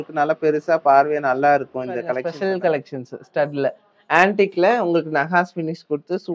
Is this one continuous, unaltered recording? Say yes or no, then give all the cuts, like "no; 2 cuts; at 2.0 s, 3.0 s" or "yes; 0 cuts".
no; 1 cut; at 2.3 s